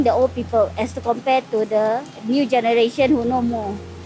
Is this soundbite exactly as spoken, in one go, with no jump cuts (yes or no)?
yes